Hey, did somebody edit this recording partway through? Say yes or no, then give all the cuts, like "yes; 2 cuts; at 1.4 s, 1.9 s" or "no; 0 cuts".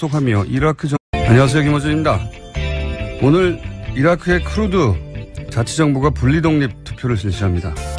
no; 0 cuts